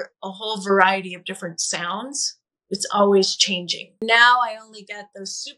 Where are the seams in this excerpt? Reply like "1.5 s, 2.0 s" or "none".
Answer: 4.0 s